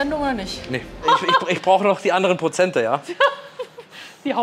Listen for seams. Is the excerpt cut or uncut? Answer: cut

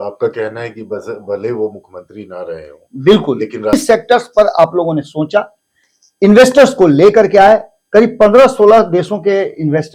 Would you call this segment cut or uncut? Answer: cut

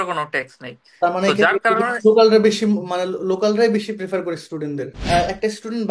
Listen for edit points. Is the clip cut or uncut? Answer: cut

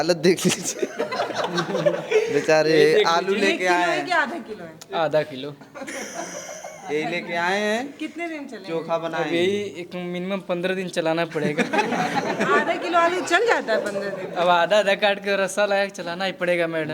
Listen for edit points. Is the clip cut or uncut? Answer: uncut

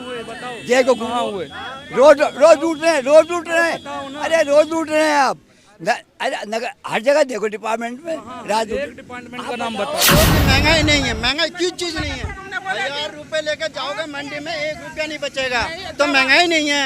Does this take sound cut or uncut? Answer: cut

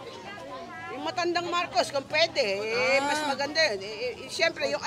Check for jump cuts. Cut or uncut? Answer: uncut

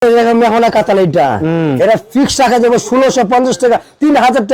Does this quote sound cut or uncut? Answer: uncut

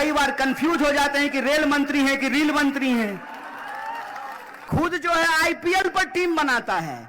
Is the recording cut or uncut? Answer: cut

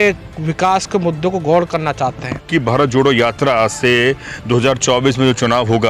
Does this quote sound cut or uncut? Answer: cut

